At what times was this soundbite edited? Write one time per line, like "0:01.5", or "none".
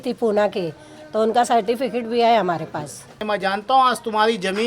0:03.2